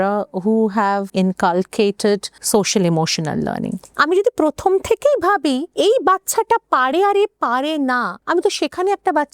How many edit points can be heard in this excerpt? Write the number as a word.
five